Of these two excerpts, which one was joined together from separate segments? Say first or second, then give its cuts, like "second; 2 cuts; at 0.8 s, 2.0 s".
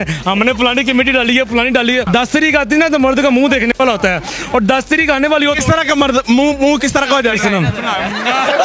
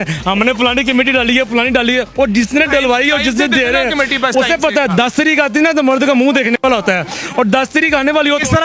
first; 1 cut; at 2.1 s